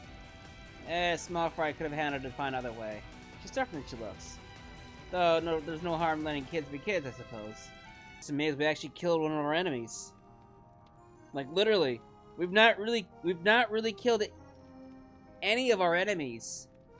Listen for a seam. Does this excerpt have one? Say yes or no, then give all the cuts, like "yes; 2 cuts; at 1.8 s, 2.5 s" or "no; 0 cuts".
yes; 1 cut; at 8.2 s